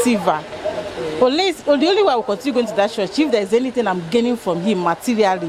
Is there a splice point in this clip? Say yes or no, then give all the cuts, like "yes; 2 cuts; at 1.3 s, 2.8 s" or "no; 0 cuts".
no; 0 cuts